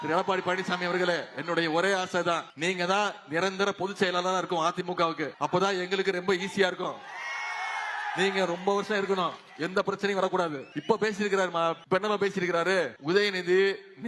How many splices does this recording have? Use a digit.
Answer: 5